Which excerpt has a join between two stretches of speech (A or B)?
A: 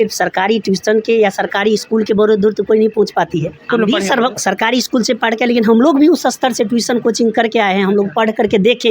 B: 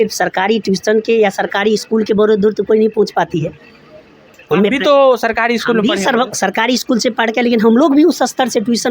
A